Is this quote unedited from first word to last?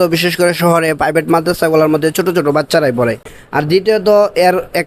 no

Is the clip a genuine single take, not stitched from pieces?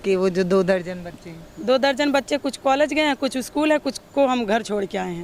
yes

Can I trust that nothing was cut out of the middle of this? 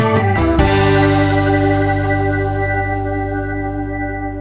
yes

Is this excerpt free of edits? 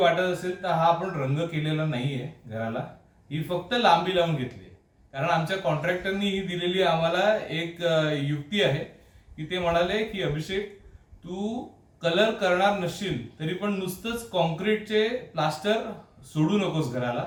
yes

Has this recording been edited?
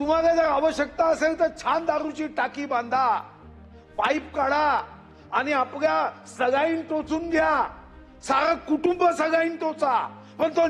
no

